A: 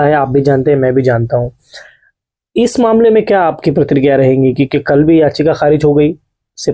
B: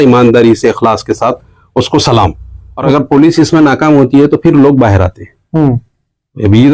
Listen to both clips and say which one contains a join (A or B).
B